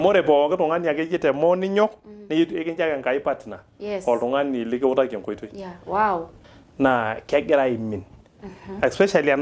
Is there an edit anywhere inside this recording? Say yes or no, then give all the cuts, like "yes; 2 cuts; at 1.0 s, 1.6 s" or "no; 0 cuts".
yes; 1 cut; at 6.4 s